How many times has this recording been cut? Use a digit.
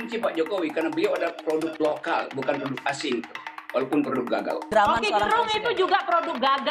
1